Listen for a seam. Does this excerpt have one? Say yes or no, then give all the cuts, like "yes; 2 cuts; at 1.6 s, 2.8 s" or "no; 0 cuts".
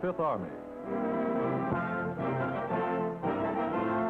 no; 0 cuts